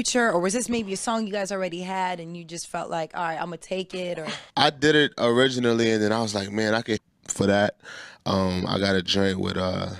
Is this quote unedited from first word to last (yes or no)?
yes